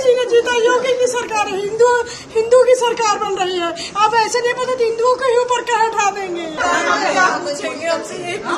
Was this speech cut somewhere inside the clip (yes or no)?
no